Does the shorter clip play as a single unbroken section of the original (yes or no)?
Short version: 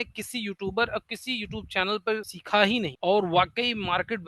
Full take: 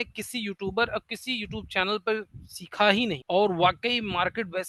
no